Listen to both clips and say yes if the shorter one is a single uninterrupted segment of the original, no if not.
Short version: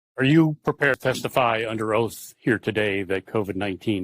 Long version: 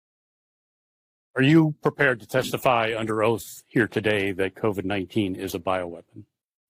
no